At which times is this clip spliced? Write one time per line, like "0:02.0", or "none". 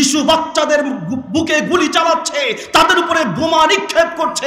none